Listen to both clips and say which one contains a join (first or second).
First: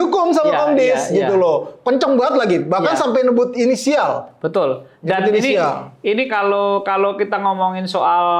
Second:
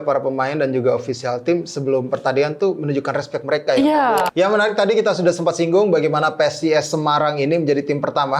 second